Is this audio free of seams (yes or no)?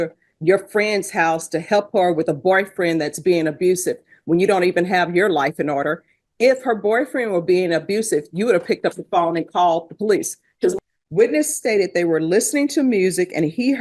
no